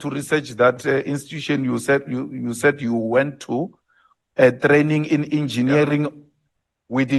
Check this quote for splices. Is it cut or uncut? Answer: uncut